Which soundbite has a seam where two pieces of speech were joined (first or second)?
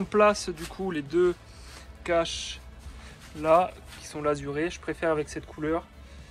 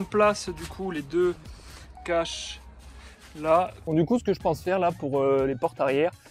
second